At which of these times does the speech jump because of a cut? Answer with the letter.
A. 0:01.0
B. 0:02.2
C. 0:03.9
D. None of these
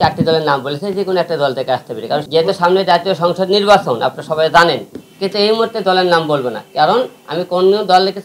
B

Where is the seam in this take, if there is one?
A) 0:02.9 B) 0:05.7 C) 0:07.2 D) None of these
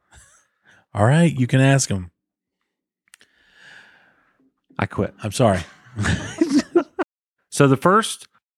C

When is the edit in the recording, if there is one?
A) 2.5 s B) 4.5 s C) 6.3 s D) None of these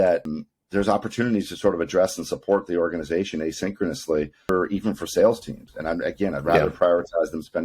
B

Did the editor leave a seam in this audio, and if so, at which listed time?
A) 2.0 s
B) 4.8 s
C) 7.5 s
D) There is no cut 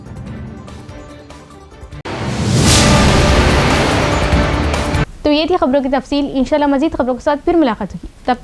D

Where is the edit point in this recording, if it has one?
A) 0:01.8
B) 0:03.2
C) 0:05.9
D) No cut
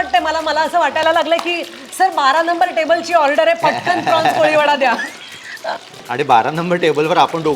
C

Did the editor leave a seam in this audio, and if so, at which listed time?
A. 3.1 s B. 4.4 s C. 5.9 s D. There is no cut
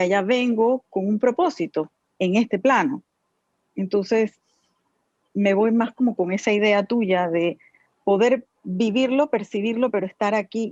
D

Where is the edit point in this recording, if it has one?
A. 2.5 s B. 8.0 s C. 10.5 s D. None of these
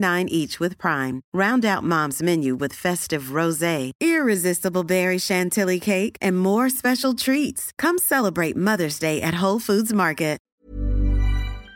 C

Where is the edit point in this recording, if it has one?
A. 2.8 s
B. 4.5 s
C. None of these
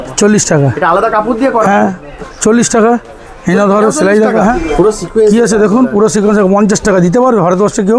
B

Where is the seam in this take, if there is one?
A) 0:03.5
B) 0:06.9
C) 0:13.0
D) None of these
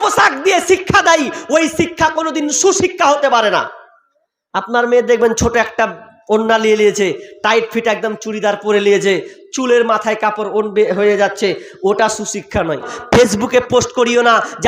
C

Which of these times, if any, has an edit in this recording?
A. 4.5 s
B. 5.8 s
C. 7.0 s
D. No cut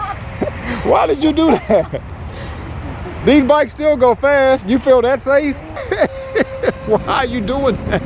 B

